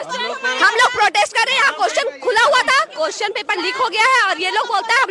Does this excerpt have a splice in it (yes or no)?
no